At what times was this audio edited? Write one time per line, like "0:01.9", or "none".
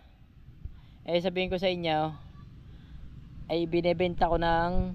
none

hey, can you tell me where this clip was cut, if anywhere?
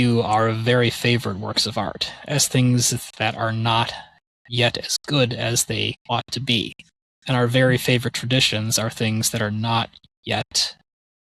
0:06.0

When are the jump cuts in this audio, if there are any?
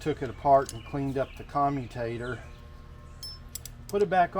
none

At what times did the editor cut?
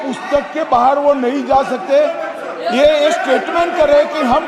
none

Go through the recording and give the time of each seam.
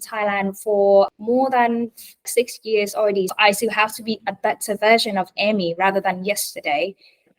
0:01.1
0:02.3
0:03.3

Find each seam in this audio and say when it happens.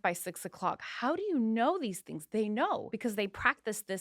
0:02.9

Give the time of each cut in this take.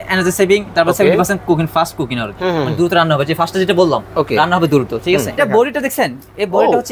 0:05.4

